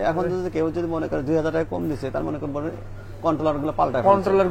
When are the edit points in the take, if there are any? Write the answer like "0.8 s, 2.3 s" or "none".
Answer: none